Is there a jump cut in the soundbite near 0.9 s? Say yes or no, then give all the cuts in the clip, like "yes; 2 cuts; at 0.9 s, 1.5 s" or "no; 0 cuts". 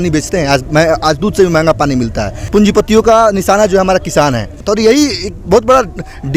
no; 2 cuts; at 2.3 s, 4.6 s